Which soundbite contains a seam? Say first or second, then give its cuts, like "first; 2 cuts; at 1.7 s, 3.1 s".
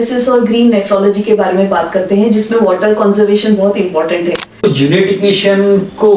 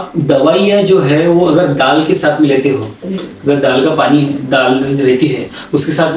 first; 1 cut; at 4.6 s